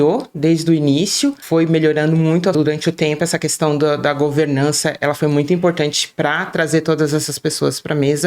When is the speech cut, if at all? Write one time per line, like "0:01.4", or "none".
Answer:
0:02.5